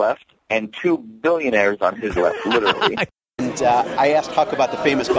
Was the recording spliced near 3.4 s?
yes; 1 cut; at 3.4 s

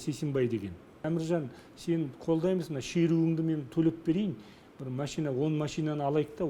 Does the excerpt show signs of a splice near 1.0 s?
yes; 1 cut; at 1.0 s

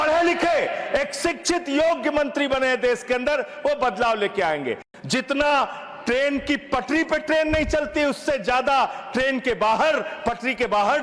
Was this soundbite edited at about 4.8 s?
yes; 1 cut; at 4.8 s

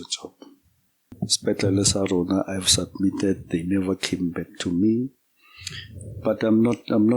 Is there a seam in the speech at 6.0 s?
no; 1 cut; at 1.2 s

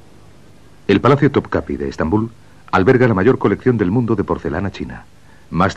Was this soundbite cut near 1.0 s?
no; 1 cut; at 3.5 s

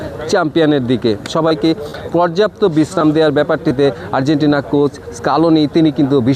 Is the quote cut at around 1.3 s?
yes; 1 cut; at 1.3 s

